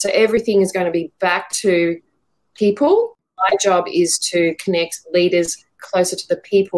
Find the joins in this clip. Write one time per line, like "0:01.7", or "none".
0:03.2

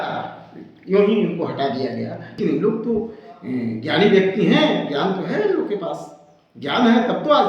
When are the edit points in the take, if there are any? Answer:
0:02.2

